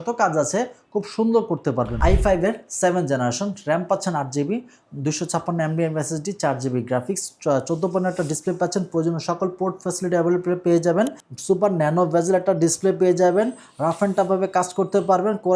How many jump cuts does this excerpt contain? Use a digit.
2